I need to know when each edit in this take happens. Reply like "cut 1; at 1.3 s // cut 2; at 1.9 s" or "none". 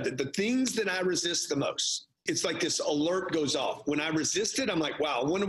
cut 1; at 2.2 s